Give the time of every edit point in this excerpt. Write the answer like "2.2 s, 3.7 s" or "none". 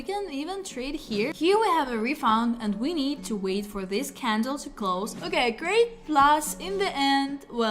1.3 s, 5.2 s